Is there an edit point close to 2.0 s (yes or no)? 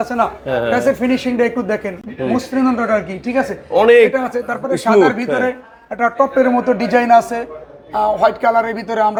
no